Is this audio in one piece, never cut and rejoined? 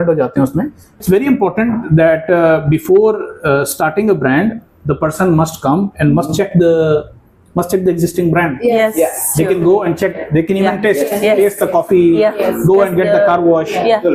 no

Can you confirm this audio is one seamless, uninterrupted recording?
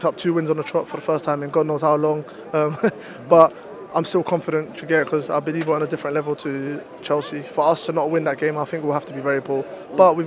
yes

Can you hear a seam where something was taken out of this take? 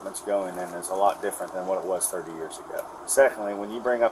yes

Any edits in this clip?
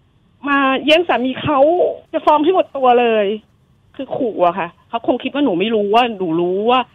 yes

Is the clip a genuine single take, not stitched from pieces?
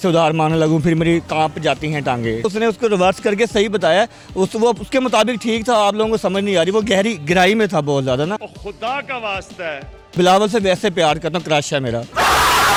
yes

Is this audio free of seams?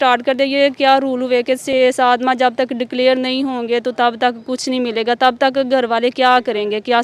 yes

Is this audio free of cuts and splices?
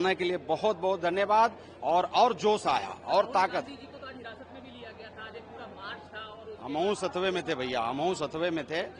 yes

